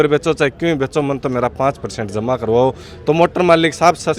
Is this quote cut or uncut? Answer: uncut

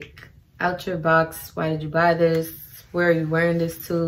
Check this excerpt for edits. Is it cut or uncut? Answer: uncut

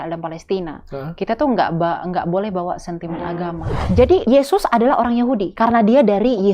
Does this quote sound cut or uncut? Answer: cut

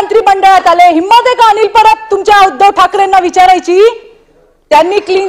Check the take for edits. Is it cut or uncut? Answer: uncut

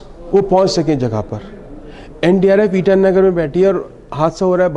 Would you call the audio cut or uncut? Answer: uncut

